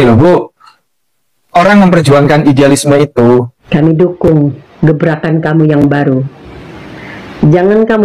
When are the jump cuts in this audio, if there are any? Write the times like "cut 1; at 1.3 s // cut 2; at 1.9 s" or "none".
cut 1; at 3.6 s